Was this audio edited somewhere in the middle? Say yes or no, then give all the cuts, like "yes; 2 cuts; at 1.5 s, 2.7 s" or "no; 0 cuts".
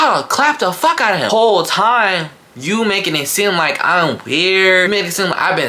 yes; 2 cuts; at 1.3 s, 4.9 s